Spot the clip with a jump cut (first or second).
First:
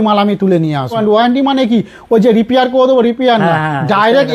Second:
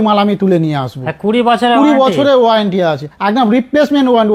first